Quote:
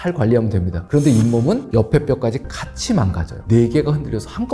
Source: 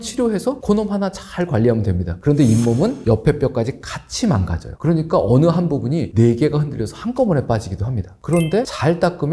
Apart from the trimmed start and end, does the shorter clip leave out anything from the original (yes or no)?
yes